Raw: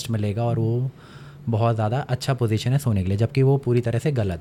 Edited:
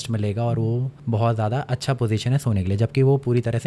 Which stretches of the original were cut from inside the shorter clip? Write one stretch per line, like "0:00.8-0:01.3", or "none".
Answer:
0:00.9-0:01.3